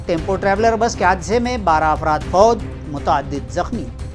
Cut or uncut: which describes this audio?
uncut